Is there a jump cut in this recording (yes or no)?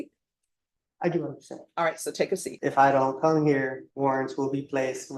yes